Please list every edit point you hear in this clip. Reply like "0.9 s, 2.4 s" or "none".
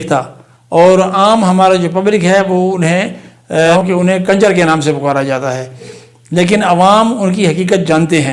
3.8 s, 6.0 s